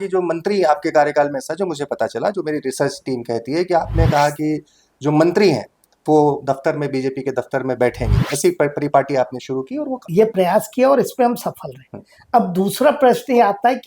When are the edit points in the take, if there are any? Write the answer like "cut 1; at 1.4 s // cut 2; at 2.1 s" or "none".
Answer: cut 1; at 10.1 s